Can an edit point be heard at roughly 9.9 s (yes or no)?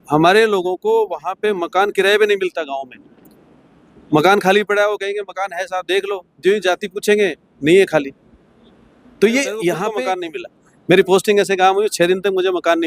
yes